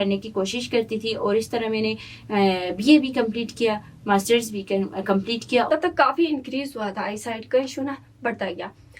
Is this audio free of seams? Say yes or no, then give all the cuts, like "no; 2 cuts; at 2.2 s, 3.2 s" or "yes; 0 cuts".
no; 1 cut; at 5.7 s